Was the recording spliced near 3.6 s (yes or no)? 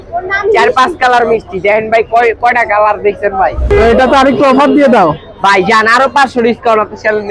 yes